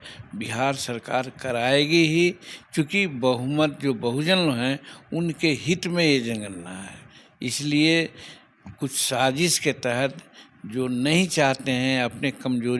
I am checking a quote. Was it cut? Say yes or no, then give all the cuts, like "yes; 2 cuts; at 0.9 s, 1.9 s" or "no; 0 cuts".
no; 0 cuts